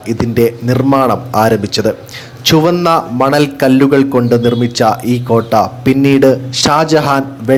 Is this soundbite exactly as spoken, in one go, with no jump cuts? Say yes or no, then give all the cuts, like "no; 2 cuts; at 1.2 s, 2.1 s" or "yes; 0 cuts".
yes; 0 cuts